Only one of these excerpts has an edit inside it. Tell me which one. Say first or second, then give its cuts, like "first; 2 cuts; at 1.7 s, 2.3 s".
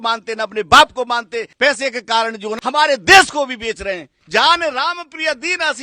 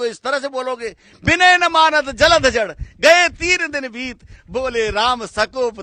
first; 3 cuts; at 1.5 s, 2.5 s, 4.1 s